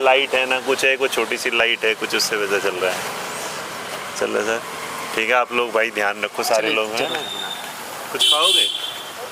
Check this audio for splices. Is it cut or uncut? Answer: uncut